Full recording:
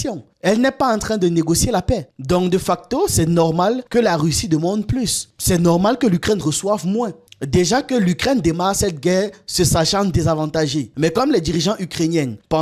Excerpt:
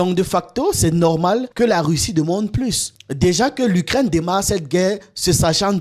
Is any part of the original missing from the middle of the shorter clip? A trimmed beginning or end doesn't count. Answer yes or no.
yes